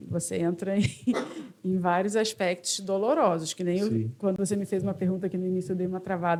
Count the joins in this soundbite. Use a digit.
0